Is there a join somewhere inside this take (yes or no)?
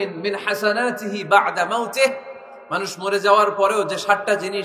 no